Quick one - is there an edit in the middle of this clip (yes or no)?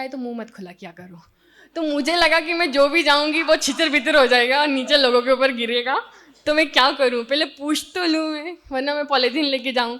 no